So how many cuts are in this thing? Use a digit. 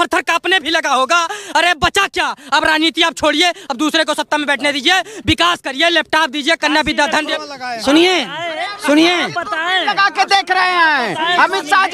1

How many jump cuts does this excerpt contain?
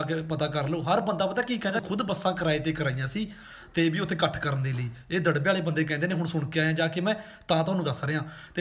0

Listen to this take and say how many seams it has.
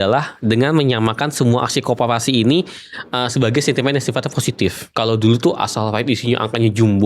1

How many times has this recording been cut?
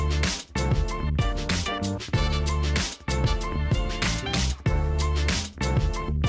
1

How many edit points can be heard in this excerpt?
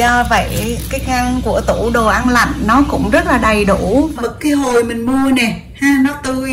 1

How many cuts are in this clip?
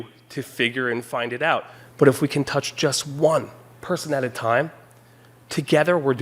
1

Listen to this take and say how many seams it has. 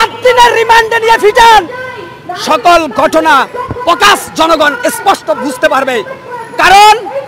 0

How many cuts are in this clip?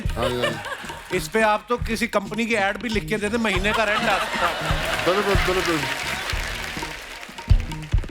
0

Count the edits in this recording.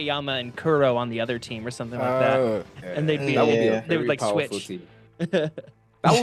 0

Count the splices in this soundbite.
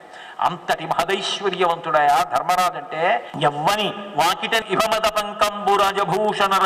1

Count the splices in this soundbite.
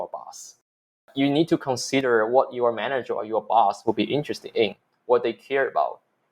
1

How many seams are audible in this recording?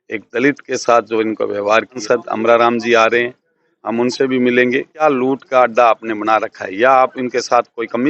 2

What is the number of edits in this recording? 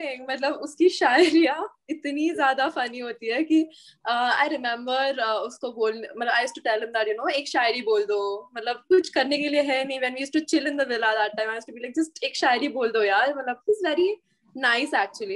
0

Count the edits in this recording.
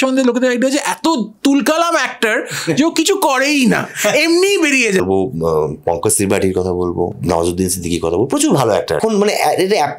3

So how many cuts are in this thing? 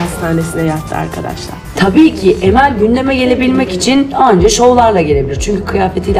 1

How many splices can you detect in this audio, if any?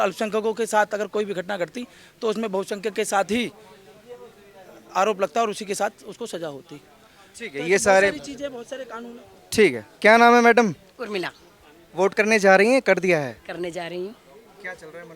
0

